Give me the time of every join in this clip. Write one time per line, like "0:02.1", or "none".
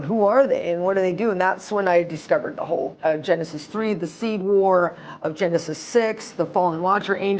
0:02.9